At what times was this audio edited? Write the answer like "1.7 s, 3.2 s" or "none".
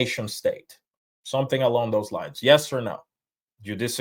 none